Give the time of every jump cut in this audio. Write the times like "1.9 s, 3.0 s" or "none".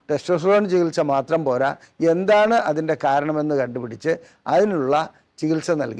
none

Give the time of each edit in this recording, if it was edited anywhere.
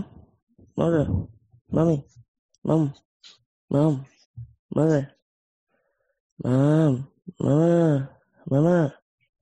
none

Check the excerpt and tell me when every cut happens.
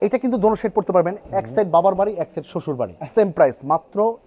3.0 s

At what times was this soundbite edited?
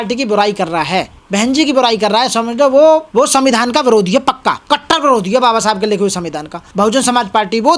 1.2 s, 3.1 s, 4.6 s, 6.6 s

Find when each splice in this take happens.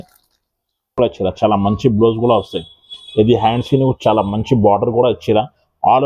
1.0 s

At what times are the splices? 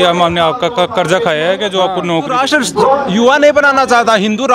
2.4 s

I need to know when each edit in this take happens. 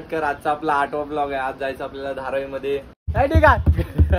3.1 s

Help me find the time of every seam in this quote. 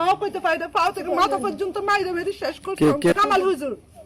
3.1 s

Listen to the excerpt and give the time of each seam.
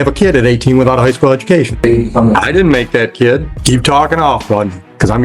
1.8 s, 3.5 s

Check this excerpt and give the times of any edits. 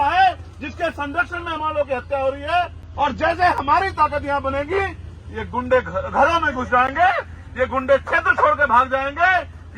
2.8 s

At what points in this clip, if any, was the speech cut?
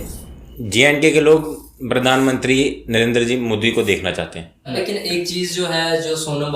4.8 s

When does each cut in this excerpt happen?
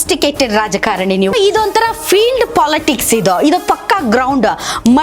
1.3 s

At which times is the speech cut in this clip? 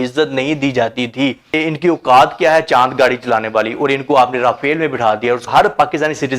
1.5 s, 5.5 s

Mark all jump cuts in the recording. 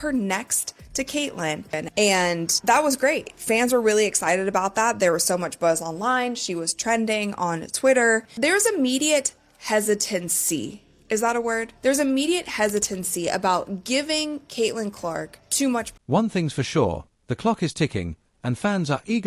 none

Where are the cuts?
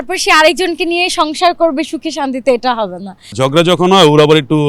3.3 s

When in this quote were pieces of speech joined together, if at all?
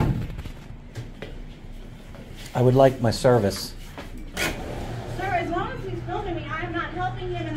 none

